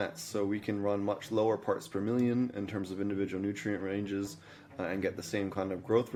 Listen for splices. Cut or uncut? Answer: uncut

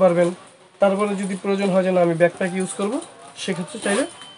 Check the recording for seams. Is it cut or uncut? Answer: uncut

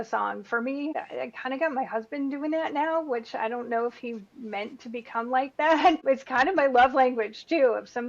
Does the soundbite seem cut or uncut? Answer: cut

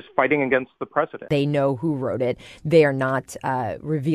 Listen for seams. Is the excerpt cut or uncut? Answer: cut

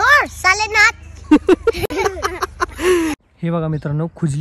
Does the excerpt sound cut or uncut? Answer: cut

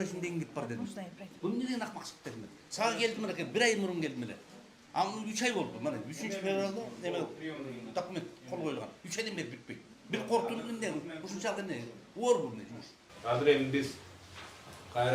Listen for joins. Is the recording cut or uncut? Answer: uncut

